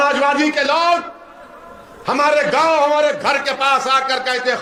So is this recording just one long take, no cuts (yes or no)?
yes